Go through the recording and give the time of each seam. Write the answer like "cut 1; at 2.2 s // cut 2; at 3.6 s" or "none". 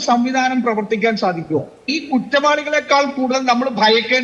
cut 1; at 1.9 s